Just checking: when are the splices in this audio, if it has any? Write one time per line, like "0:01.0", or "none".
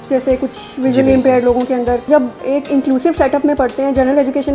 0:02.1